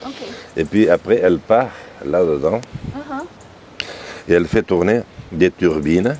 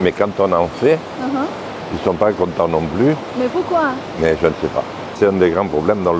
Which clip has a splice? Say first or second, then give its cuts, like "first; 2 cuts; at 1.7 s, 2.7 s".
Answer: second; 1 cut; at 5.1 s